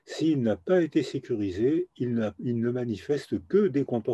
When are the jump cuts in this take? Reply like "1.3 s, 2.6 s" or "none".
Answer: none